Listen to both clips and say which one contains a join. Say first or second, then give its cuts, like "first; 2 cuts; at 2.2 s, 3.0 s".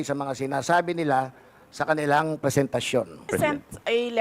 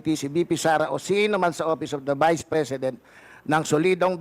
first; 1 cut; at 3.2 s